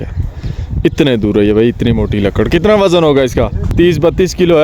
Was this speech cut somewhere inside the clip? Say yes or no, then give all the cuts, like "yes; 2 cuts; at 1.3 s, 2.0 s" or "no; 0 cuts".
yes; 1 cut; at 3.6 s